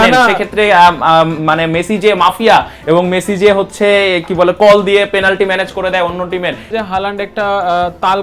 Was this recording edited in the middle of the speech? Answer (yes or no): yes